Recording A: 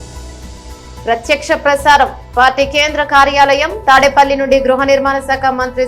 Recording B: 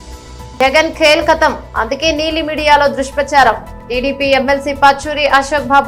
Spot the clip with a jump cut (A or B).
A